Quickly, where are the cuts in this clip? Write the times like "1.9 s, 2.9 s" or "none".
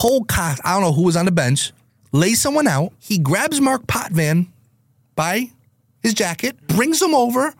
3.0 s, 6.6 s